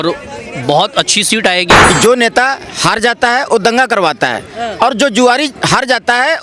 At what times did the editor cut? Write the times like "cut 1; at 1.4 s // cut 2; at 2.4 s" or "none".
cut 1; at 1.8 s